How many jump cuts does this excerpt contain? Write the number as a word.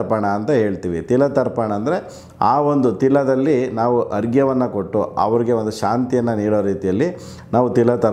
zero